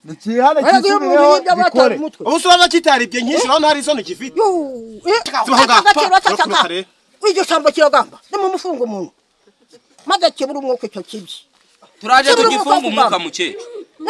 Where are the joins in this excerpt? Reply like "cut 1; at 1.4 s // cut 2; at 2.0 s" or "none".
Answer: cut 1; at 5.3 s